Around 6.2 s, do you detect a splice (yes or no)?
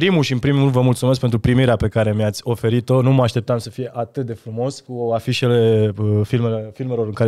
no